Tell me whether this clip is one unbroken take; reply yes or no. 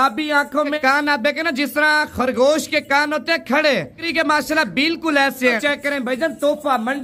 no